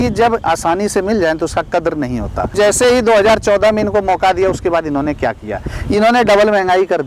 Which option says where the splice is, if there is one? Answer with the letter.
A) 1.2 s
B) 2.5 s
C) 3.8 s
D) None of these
B